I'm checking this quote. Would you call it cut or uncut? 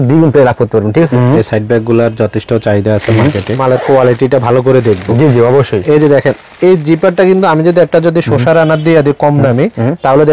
cut